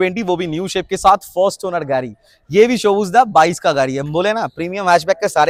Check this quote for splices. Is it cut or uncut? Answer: uncut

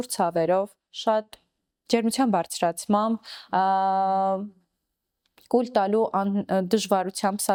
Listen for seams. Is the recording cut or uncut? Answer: uncut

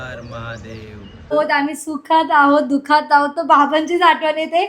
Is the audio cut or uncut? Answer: cut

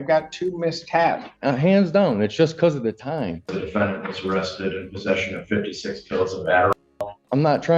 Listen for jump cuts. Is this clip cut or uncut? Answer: cut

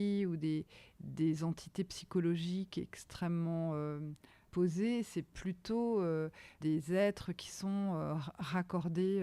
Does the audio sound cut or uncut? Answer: uncut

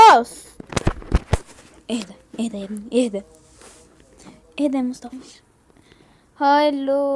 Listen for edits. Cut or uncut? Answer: cut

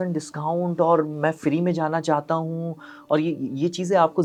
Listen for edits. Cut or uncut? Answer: uncut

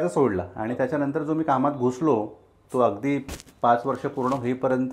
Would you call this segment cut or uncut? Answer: uncut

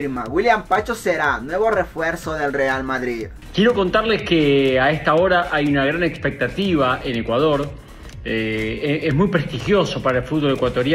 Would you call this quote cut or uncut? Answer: cut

